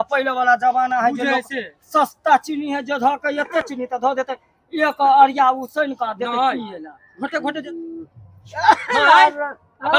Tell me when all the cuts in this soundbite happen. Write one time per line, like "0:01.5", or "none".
0:07.5